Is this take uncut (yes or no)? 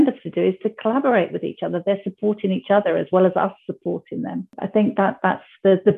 no